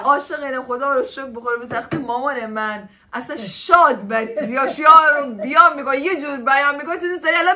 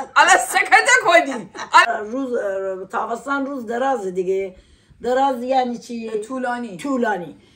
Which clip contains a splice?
second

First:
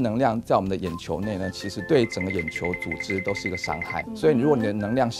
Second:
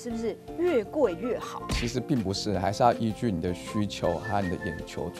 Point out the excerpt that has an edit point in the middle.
first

